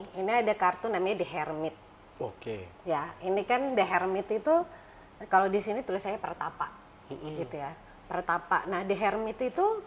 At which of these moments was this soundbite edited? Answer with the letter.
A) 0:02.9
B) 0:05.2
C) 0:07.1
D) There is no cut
D